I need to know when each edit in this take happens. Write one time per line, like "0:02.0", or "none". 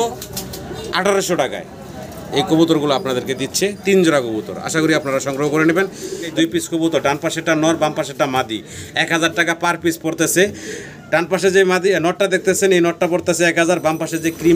0:06.3